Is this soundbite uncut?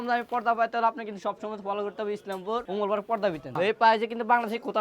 no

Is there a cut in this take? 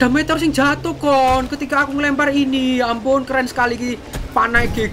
no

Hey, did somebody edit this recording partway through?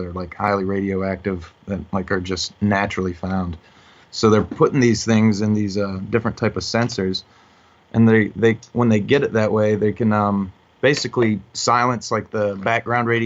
no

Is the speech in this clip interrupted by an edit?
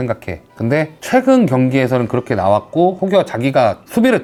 no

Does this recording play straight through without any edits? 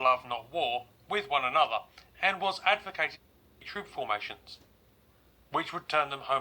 no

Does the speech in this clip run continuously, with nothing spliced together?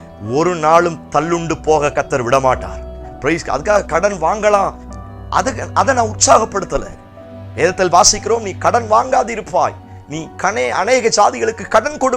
yes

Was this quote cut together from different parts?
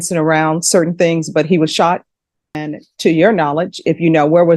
yes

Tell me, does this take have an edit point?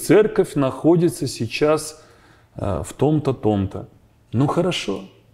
no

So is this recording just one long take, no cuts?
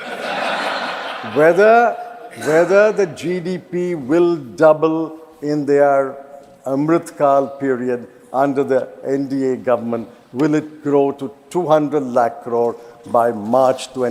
yes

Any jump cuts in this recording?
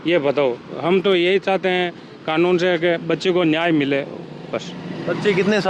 no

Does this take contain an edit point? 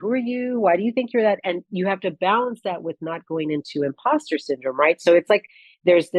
no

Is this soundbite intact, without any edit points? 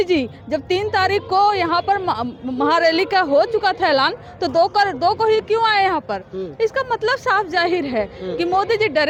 yes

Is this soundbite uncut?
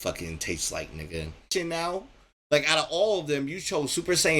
no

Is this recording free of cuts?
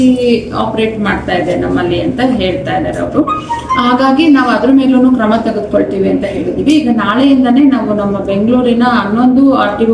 yes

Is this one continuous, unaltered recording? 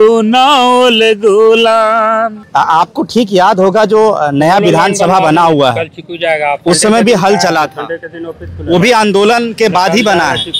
no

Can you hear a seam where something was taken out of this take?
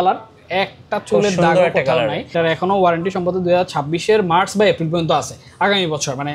yes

